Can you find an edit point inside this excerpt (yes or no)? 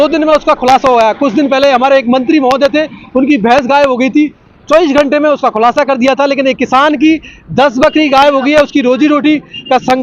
no